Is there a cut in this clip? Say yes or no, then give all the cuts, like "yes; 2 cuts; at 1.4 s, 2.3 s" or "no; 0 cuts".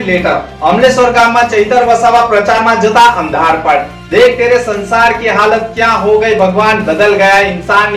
no; 0 cuts